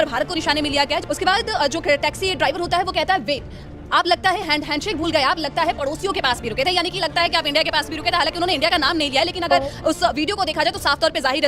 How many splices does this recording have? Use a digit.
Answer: 0